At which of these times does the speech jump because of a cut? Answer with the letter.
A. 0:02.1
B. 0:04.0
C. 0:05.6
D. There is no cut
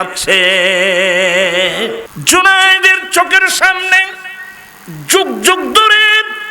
A